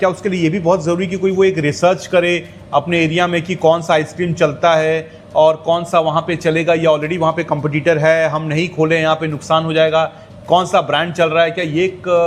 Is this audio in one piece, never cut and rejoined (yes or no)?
yes